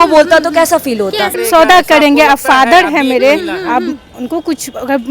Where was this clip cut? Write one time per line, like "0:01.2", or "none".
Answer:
0:01.4

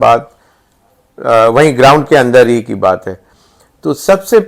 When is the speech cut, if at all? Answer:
none

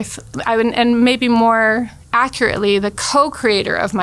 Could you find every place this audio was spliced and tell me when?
none

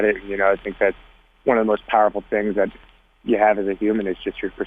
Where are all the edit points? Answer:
none

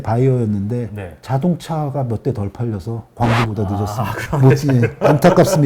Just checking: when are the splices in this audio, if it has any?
0:04.1

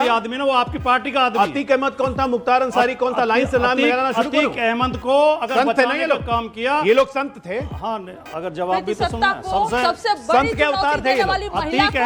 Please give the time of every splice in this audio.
none

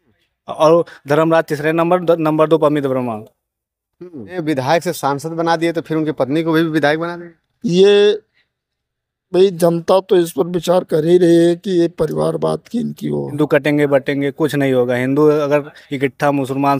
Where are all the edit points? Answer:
0:04.4
0:13.3

